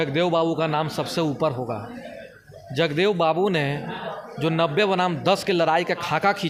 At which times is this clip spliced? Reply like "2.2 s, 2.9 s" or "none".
none